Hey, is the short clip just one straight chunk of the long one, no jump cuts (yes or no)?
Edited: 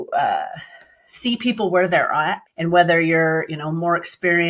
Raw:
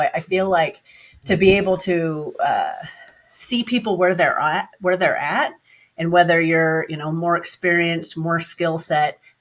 no